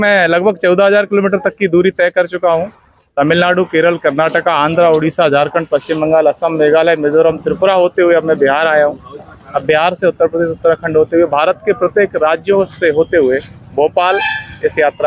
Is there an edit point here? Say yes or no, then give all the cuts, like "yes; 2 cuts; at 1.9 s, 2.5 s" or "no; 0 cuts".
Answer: no; 0 cuts